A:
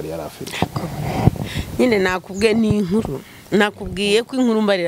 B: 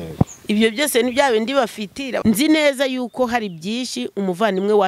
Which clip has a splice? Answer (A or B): B